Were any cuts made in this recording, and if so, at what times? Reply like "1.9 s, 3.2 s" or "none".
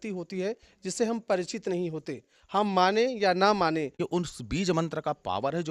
4.0 s